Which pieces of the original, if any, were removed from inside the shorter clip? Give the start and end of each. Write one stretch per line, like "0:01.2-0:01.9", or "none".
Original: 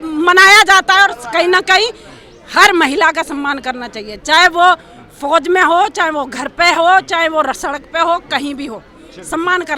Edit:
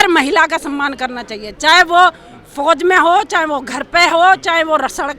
none

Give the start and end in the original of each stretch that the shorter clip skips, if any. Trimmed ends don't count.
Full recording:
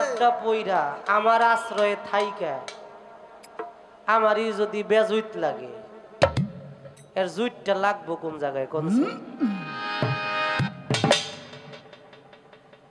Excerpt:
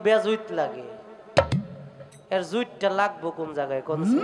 none

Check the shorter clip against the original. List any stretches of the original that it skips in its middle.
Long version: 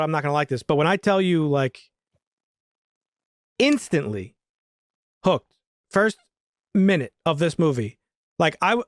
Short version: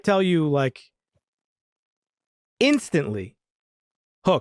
none

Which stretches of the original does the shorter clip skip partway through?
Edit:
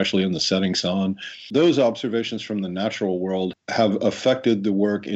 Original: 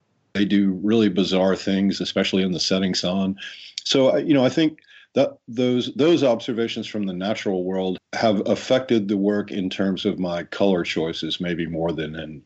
0:03.6-0:05.9

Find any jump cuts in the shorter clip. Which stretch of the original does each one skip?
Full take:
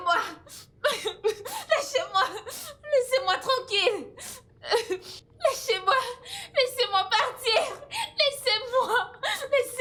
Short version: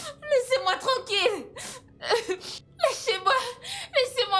none

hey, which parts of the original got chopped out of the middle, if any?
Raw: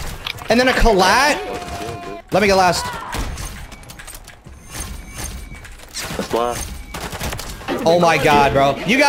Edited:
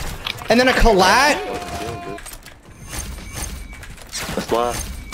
0:02.2-0:04.0

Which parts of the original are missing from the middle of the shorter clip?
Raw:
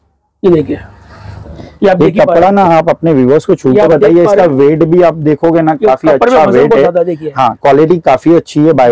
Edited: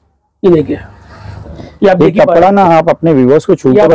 none

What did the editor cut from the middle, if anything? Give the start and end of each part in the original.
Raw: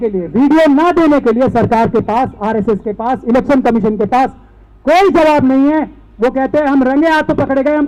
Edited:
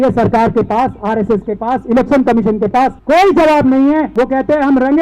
0:04.4-0:04.8
0:05.9-0:06.1

